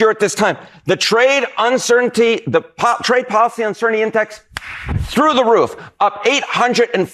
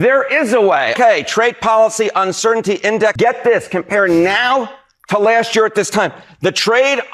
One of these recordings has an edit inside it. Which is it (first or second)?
second